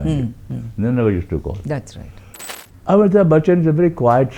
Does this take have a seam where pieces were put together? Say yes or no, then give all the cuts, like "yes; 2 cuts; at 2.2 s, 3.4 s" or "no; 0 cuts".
yes; 1 cut; at 2.5 s